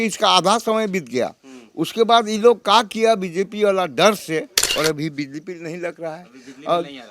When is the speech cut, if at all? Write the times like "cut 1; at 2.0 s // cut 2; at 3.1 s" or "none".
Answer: cut 1; at 4.6 s

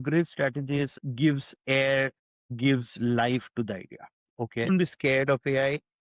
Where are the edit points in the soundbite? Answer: cut 1; at 4.7 s

